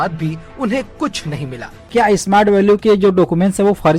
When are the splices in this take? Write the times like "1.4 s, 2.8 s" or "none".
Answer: 1.9 s